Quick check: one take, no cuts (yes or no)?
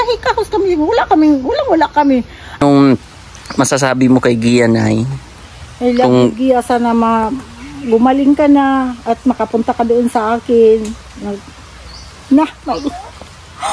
no